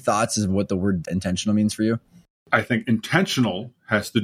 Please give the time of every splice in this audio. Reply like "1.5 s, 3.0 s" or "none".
1.1 s, 2.4 s